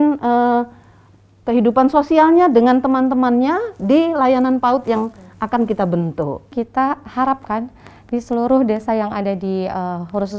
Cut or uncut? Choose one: cut